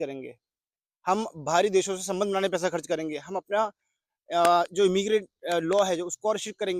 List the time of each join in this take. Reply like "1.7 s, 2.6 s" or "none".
none